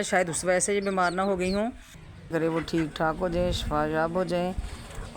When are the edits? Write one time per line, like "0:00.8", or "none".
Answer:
0:02.3